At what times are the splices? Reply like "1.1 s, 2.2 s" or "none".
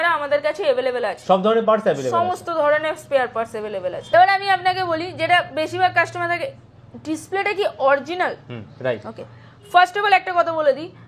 none